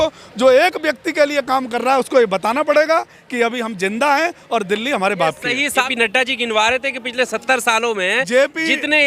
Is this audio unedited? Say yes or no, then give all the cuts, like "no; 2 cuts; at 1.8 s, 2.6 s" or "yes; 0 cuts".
no; 1 cut; at 5.9 s